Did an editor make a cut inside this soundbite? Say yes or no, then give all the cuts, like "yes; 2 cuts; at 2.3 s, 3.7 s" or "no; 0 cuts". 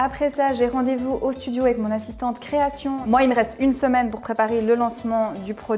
yes; 1 cut; at 3.0 s